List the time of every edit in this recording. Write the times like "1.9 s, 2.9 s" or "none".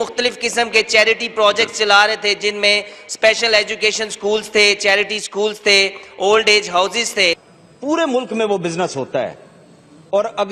7.5 s